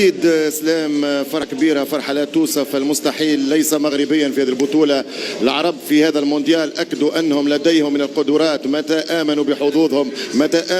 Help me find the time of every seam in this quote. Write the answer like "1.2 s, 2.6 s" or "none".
1.5 s